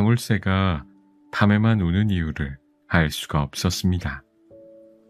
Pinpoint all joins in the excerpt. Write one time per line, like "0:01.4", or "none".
0:04.2